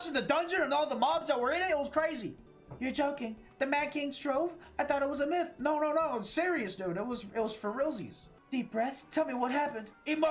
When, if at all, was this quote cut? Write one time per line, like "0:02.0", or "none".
0:08.3